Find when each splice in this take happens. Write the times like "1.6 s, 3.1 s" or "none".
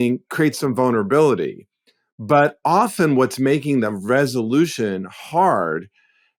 none